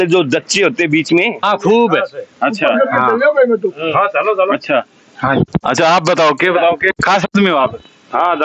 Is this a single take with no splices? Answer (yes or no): no